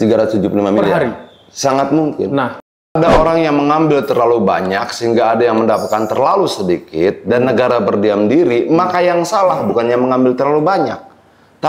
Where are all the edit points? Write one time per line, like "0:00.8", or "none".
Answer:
0:03.0

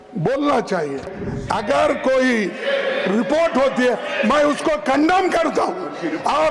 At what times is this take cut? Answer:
0:01.2

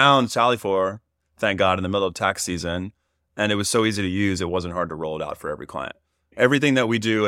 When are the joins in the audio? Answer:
0:06.3

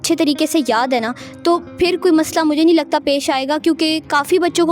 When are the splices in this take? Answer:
none

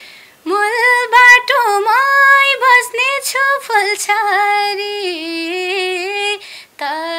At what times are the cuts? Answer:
none

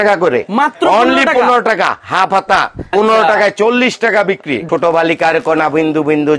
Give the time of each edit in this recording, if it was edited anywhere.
0:02.9
0:04.7

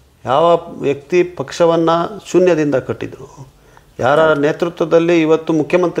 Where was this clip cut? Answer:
none

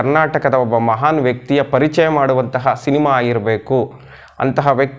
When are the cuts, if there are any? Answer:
none

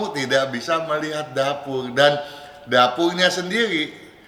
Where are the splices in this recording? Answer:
none

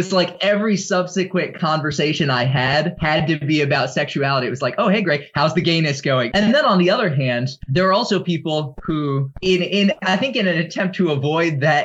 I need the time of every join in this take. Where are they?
0:02.9
0:06.3
0:07.6
0:09.3

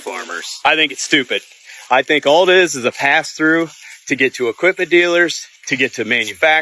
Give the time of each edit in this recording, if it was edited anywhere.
none

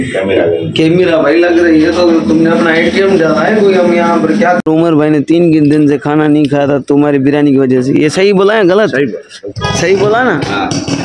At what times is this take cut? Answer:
0:04.6

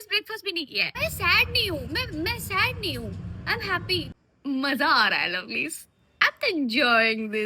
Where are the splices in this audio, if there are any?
0:00.9
0:04.1

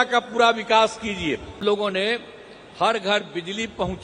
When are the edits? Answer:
0:01.6

